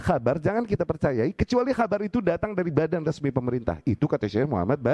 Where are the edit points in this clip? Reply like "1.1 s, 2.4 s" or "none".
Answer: none